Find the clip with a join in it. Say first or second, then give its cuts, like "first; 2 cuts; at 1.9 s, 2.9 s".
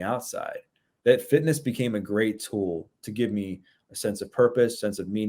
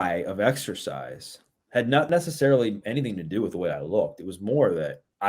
second; 1 cut; at 2.1 s